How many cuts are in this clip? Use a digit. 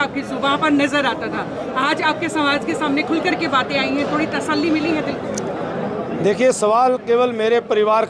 0